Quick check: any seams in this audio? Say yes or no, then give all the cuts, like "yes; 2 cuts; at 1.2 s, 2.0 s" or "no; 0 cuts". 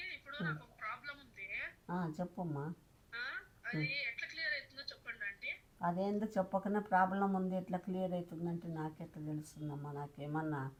no; 0 cuts